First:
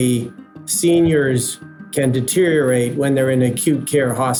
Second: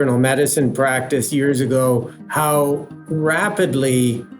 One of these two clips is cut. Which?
second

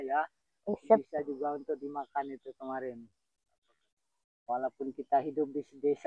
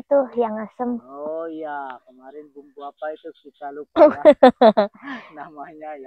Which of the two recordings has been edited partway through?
first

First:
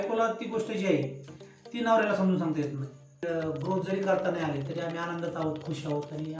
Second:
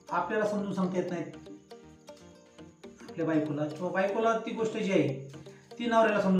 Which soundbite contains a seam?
first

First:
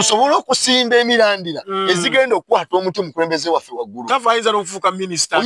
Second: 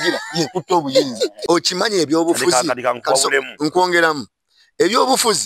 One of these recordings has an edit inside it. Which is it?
second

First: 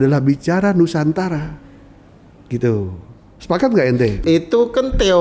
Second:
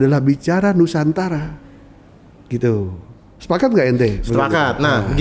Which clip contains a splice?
first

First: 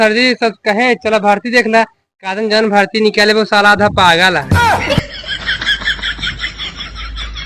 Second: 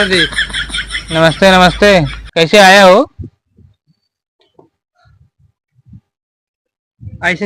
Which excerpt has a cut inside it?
first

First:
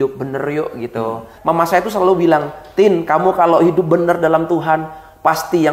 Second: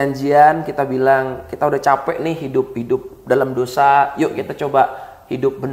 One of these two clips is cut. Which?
first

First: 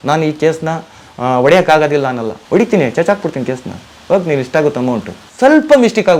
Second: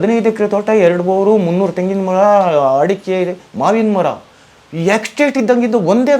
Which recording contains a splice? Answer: first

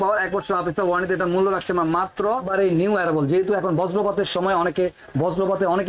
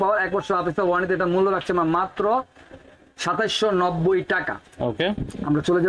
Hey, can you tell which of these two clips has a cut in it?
first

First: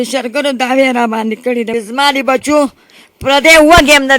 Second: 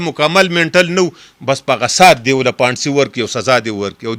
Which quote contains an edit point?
first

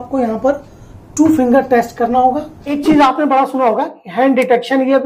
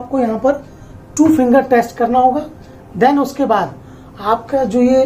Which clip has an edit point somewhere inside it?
first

